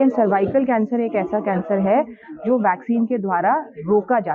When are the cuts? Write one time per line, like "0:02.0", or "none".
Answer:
none